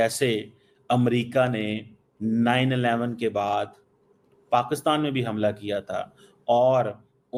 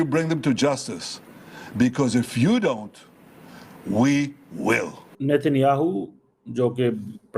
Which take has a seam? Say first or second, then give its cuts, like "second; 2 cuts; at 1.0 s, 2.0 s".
second; 1 cut; at 5.4 s